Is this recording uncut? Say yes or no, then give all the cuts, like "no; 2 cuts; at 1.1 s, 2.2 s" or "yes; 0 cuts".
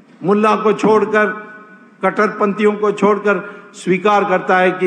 yes; 0 cuts